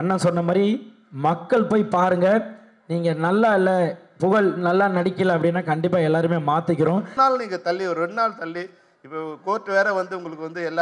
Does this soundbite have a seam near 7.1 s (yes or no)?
yes